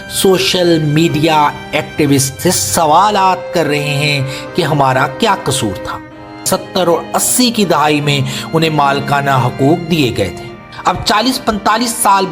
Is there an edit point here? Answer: yes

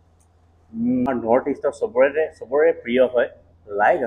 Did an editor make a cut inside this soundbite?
yes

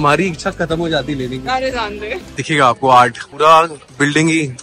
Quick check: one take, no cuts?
no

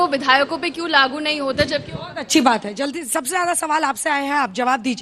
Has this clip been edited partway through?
no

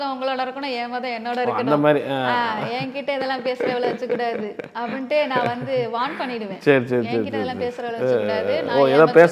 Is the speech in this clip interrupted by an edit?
no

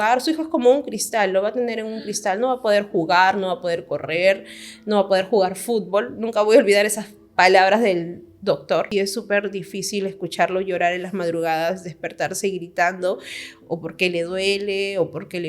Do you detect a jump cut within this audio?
yes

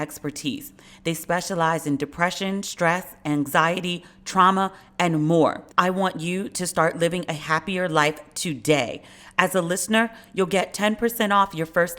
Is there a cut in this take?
yes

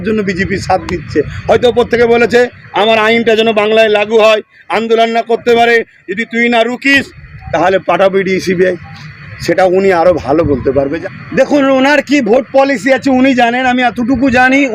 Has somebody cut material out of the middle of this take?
yes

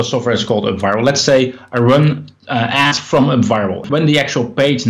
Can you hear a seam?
yes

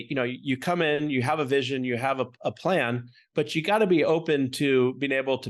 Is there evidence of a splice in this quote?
no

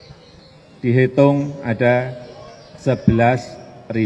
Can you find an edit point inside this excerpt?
no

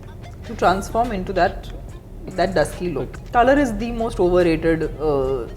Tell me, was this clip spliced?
yes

